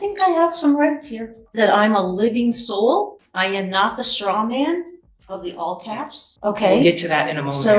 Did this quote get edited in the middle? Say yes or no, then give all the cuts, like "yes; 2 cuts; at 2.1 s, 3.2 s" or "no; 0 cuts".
yes; 3 cuts; at 1.4 s, 3.2 s, 6.3 s